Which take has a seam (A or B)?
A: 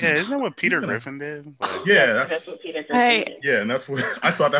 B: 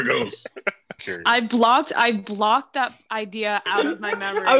B